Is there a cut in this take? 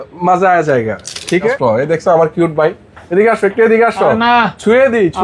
yes; 1 cut; at 1.5 s

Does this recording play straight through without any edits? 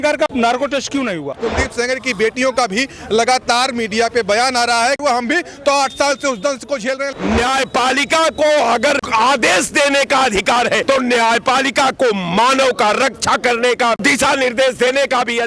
no; 6 cuts; at 1.4 s, 5.0 s, 7.0 s, 9.0 s, 10.8 s, 14.0 s

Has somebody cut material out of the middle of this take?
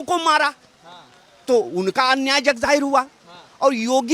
no; 0 cuts

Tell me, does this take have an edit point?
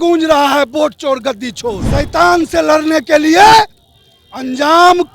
yes; 1 cut; at 1.8 s

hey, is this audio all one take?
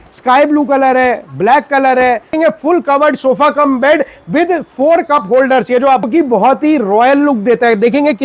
no; 2 cuts; at 2.3 s, 6.1 s

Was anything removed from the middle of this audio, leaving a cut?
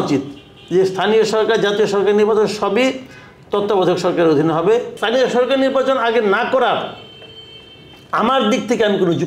yes; 1 cut; at 5.0 s

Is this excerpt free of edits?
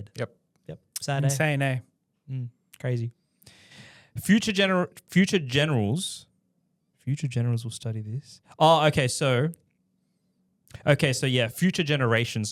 yes; 0 cuts

